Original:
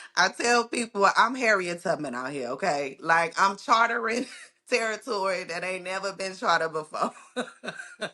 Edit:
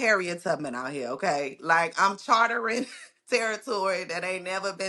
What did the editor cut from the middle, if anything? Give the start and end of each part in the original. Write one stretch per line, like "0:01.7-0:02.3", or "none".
none